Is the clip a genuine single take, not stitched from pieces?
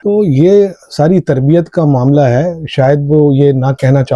yes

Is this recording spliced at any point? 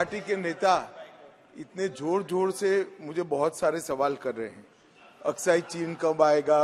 no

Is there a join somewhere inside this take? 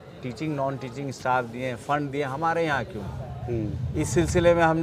no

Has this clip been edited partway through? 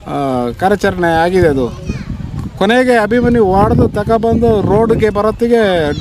no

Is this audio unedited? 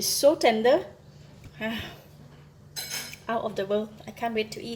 yes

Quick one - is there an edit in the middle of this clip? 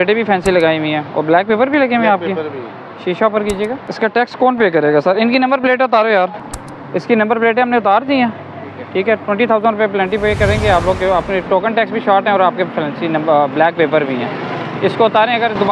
no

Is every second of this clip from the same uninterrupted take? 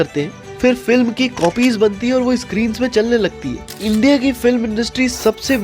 no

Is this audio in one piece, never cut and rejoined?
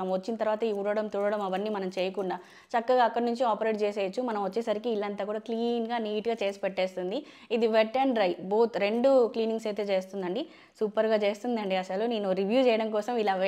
yes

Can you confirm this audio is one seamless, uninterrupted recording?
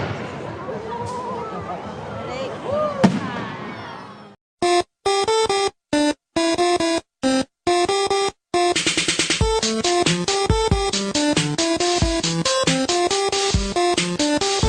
no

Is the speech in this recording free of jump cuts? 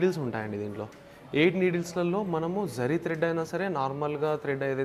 yes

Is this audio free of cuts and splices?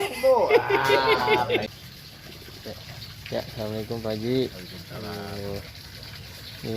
no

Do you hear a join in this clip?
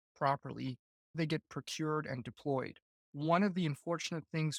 no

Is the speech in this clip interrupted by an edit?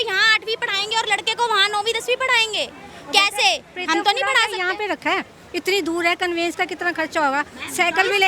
no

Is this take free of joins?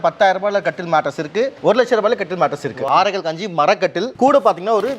no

